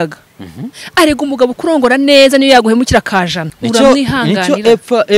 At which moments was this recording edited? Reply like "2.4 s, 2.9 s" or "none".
3.4 s